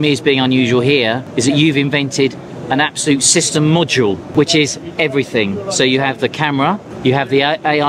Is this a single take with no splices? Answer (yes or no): no